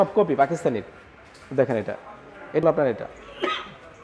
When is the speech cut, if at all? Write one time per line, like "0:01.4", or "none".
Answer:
0:02.6